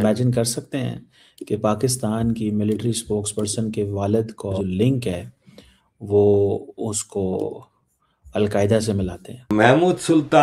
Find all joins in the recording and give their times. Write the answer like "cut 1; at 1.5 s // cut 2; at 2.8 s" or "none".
cut 1; at 4.6 s // cut 2; at 9.4 s